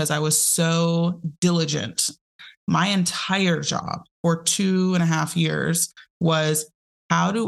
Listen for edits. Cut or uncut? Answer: cut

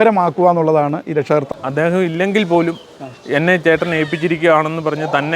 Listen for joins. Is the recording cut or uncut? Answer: cut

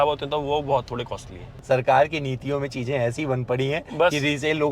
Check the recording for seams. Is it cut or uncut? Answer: cut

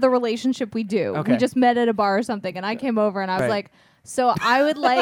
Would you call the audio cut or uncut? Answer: uncut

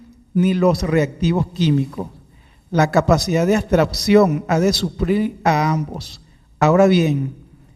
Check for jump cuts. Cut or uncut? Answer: cut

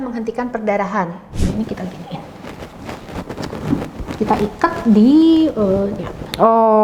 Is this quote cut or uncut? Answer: cut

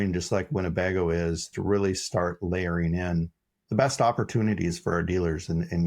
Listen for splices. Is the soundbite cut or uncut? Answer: cut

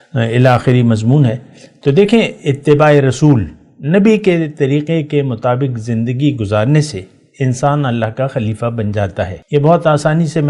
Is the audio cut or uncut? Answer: cut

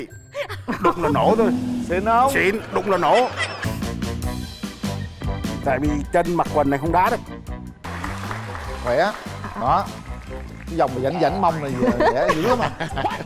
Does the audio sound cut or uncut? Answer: cut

